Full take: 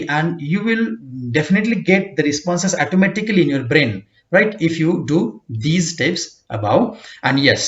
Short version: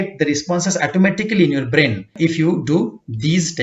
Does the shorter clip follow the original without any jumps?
no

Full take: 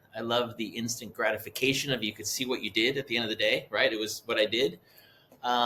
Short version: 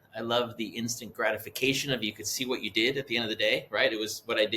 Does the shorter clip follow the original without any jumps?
yes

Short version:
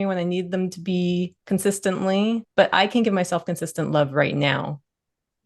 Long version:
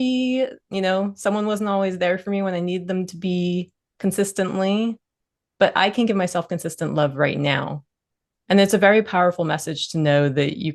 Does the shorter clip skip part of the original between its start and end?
yes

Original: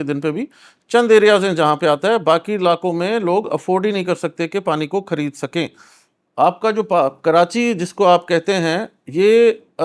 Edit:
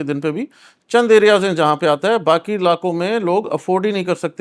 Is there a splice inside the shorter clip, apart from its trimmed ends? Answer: no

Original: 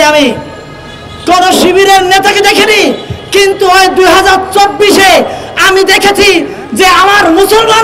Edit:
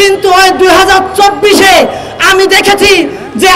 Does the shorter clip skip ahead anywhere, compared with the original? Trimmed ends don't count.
no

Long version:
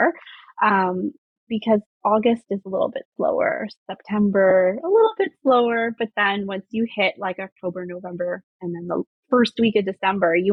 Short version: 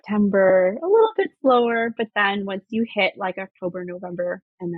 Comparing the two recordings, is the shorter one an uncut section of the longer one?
yes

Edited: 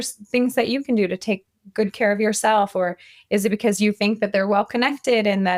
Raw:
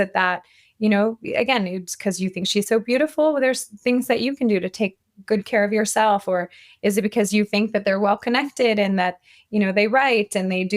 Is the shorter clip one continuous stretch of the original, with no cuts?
yes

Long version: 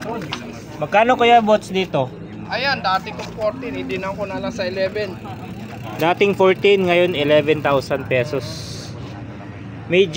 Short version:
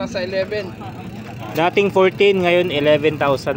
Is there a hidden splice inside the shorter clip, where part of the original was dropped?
no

